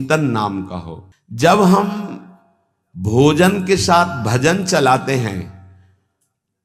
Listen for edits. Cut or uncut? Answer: uncut